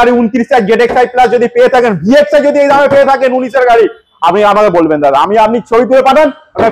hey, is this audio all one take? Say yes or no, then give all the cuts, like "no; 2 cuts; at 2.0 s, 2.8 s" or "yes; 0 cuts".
yes; 0 cuts